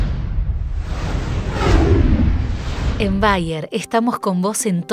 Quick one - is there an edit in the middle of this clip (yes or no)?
yes